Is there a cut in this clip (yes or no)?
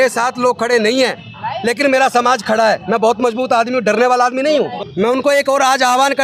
yes